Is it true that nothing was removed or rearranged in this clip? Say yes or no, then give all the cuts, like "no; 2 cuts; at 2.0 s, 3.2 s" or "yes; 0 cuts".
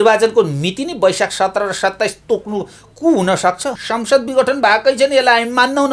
no; 1 cut; at 3.8 s